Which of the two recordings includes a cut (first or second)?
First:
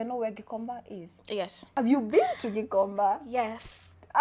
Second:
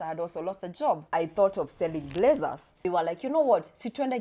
second